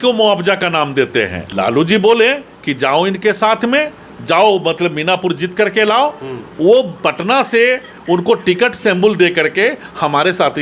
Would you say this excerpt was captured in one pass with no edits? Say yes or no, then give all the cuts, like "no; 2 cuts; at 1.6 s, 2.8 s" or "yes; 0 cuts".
no; 1 cut; at 1.4 s